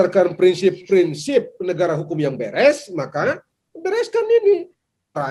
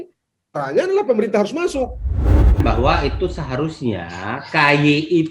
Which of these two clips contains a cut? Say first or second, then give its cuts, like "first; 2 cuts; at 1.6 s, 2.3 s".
second; 1 cut; at 2.3 s